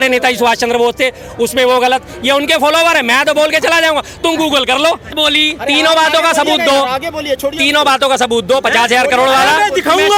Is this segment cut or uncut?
uncut